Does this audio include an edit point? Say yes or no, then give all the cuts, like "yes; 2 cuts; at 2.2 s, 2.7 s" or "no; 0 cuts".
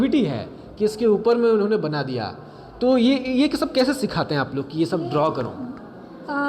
no; 0 cuts